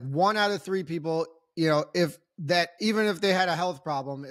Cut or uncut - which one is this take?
uncut